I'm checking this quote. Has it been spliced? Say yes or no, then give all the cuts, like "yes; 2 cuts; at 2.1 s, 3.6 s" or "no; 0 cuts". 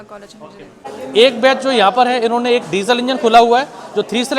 yes; 1 cut; at 0.9 s